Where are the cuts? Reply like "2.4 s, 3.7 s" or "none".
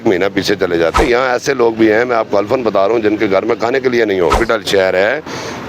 1.0 s, 4.4 s